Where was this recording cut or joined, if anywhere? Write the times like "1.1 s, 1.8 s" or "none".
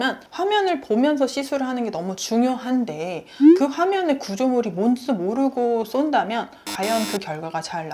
none